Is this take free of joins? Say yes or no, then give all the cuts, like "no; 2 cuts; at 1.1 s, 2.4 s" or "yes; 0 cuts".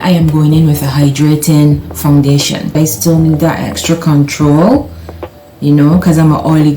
no; 1 cut; at 2.8 s